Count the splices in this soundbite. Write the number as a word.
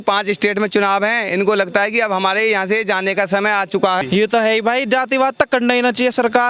one